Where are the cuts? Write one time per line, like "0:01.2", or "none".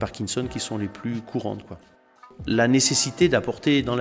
0:02.3